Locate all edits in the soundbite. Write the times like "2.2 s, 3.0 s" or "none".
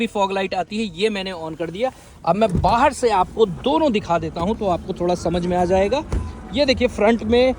none